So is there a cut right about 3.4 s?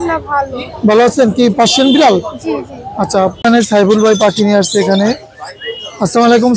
yes; 1 cut; at 3.4 s

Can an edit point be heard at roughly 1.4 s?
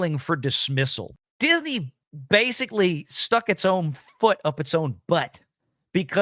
no; 0 cuts

